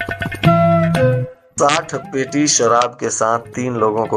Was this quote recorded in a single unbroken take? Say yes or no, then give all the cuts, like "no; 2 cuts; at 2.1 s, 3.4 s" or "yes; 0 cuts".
no; 1 cut; at 1.3 s